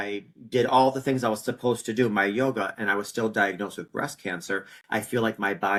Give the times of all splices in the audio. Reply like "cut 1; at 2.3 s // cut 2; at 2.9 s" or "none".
none